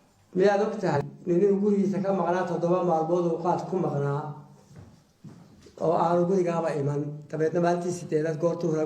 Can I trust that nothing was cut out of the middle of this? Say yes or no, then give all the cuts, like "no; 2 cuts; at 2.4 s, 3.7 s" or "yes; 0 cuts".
no; 1 cut; at 1.0 s